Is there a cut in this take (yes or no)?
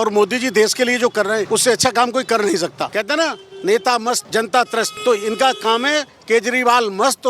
yes